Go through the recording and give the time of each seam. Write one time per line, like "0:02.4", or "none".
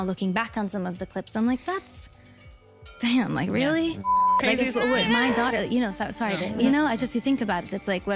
0:03.0
0:04.1
0:06.5